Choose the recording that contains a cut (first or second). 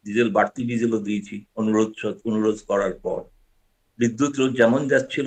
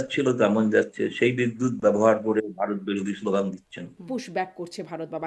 second